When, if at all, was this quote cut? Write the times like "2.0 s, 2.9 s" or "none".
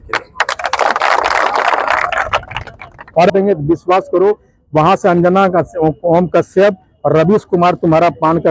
3.3 s